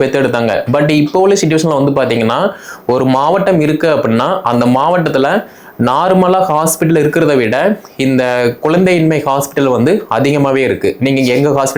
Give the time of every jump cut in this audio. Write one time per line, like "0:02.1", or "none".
none